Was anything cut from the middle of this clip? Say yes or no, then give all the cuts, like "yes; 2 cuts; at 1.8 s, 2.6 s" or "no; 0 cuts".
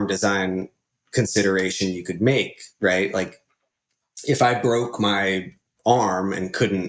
no; 0 cuts